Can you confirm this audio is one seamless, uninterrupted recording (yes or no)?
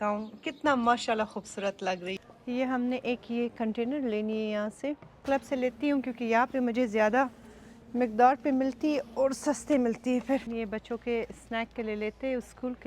no